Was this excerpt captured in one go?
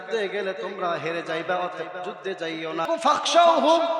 no; 1 cut; at 2.9 s

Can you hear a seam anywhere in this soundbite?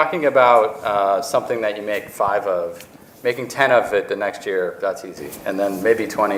no; 0 cuts

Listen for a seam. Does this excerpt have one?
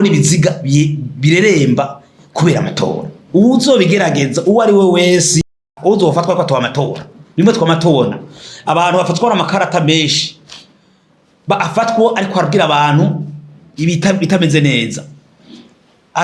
yes; 1 cut; at 5.5 s

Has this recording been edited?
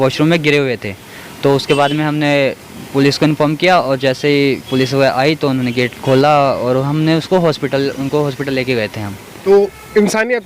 yes; 1 cut; at 9.3 s

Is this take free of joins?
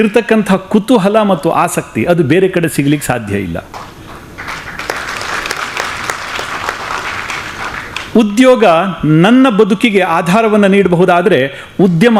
yes; 0 cuts

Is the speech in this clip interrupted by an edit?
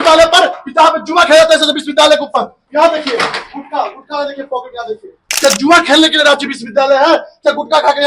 yes; 1 cut; at 5.3 s

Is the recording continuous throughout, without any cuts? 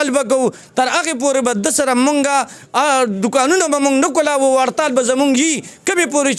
yes; 0 cuts

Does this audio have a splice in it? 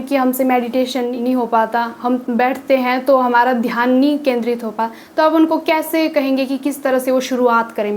no; 0 cuts

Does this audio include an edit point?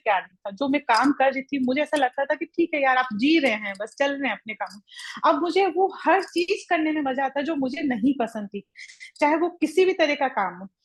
no; 0 cuts

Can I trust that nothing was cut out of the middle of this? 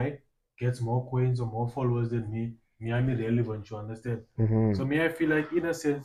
yes; 0 cuts

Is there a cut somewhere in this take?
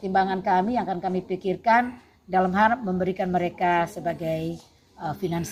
no; 0 cuts

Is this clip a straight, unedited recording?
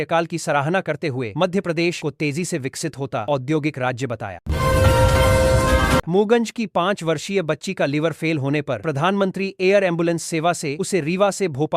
no; 2 cuts; at 4.4 s, 6.1 s

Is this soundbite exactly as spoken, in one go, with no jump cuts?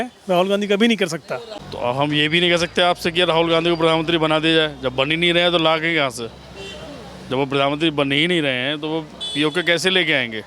no; 1 cut; at 1.6 s

